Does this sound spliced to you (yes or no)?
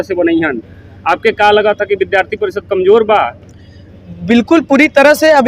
no